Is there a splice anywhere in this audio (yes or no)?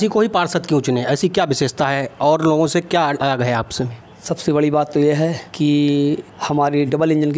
no